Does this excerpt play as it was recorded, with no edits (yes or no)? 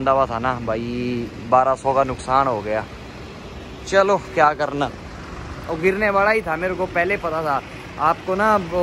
yes